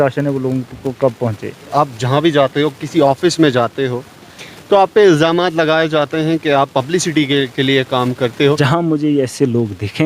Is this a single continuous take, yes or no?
no